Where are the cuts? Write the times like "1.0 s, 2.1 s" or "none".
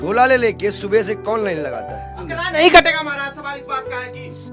2.3 s